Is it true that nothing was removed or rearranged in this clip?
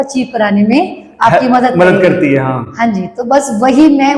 yes; 0 cuts

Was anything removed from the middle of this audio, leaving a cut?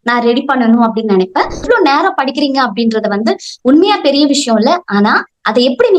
yes; 1 cut; at 1.6 s

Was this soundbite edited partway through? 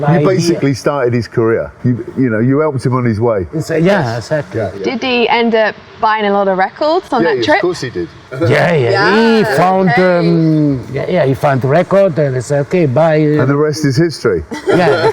no; 0 cuts

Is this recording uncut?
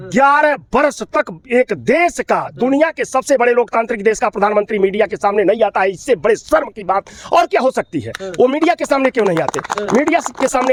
yes; 0 cuts

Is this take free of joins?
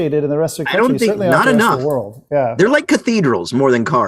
yes; 0 cuts

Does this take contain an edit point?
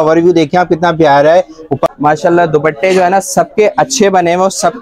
yes; 1 cut; at 1.9 s

